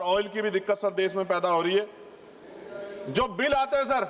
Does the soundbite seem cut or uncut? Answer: uncut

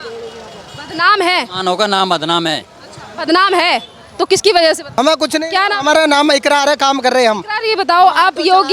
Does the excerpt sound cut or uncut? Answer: cut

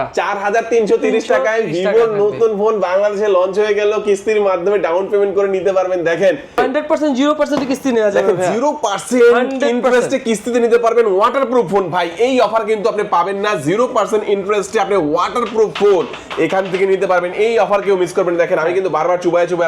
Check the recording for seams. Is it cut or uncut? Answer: cut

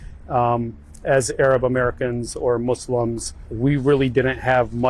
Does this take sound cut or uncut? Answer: uncut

